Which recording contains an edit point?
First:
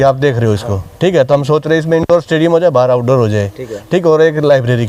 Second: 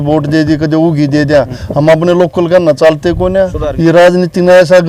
second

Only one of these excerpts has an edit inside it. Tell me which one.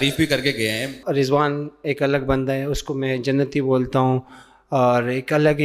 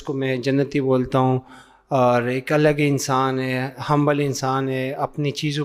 first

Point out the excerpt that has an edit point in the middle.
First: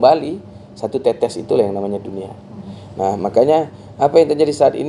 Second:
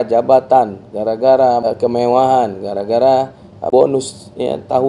second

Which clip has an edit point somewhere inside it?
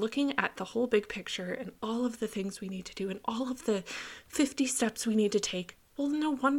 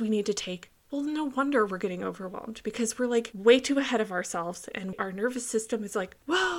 second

